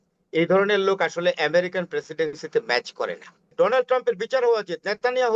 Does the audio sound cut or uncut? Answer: cut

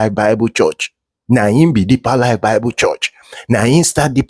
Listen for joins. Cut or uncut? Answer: uncut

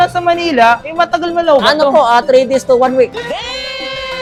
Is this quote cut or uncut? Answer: uncut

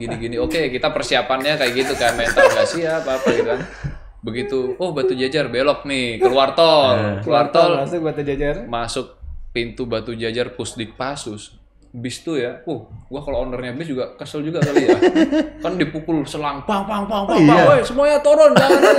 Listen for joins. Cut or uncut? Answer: uncut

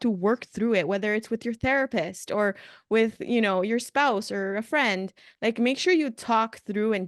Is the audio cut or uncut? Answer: uncut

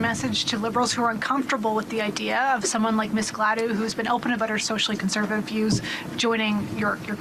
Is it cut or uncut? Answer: uncut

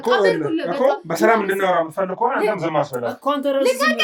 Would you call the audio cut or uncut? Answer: uncut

